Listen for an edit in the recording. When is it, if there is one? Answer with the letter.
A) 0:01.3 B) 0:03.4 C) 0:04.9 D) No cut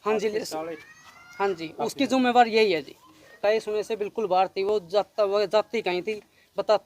B